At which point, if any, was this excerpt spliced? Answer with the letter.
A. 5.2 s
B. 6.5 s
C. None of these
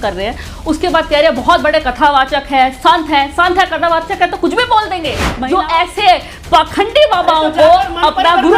A